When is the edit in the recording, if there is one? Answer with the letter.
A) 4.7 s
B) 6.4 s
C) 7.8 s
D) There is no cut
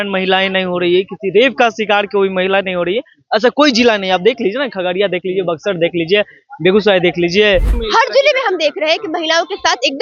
C